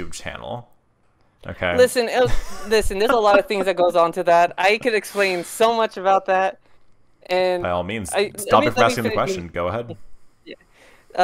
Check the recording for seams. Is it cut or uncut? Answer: uncut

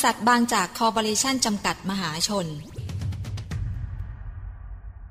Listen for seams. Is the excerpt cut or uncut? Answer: cut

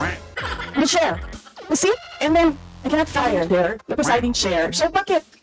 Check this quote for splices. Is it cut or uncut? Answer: uncut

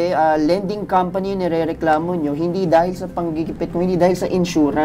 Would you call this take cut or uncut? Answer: uncut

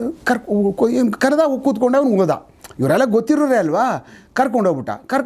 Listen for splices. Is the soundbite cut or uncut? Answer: uncut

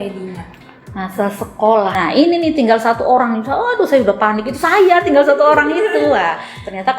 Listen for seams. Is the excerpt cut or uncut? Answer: cut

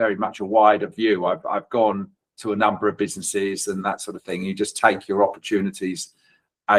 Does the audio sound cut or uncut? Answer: uncut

